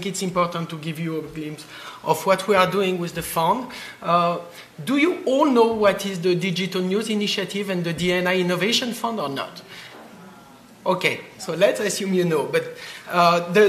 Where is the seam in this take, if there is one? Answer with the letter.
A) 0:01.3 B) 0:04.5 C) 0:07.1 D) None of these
D